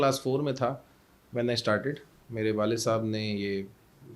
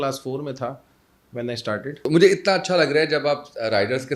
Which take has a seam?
second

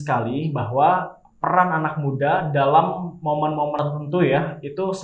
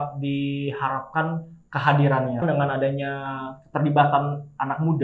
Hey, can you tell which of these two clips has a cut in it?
second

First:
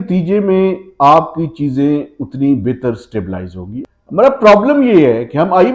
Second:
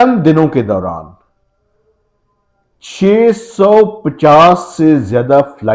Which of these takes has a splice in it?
first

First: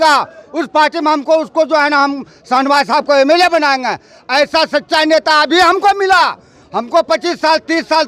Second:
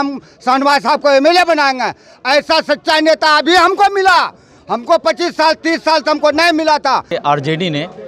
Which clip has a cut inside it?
second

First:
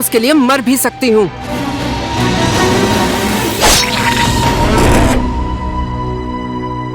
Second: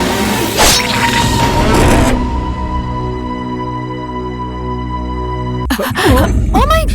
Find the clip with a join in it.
second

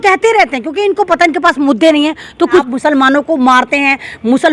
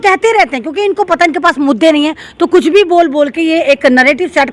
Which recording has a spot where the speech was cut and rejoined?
first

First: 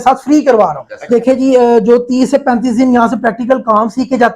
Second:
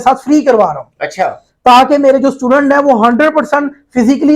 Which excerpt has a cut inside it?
first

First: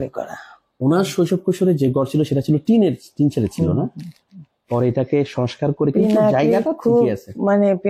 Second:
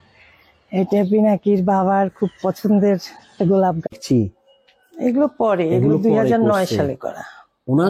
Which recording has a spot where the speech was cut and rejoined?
second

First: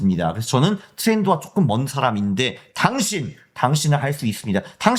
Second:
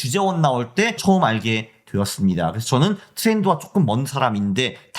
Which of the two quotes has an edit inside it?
second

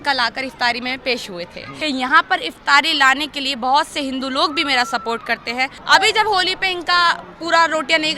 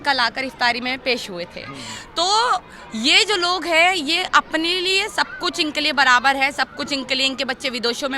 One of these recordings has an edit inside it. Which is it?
first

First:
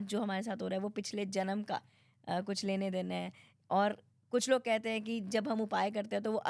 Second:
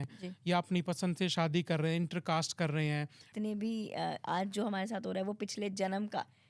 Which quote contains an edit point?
second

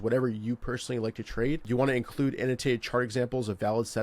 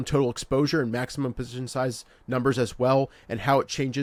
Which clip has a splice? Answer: first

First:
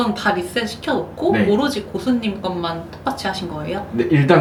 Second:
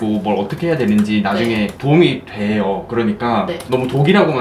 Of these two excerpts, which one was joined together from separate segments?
second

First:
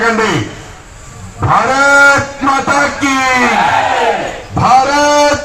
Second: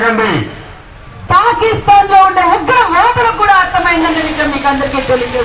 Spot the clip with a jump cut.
second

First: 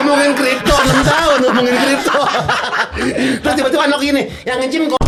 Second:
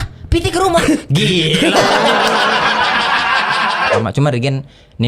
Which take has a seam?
second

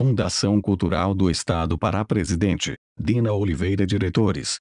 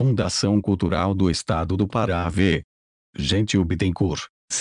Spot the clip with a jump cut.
second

